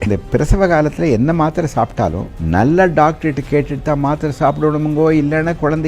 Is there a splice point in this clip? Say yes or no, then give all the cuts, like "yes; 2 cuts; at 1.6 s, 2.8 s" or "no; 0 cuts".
no; 0 cuts